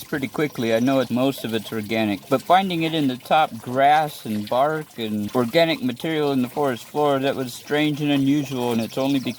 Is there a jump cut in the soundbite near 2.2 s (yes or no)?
yes